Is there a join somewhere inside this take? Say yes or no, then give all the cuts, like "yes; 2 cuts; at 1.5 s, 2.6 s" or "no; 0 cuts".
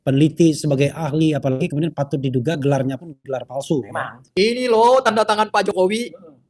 yes; 1 cut; at 4.2 s